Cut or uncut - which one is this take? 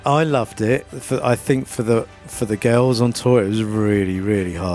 cut